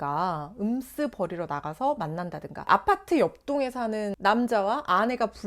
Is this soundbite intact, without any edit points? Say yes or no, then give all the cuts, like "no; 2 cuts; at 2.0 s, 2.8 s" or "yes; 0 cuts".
no; 1 cut; at 2.6 s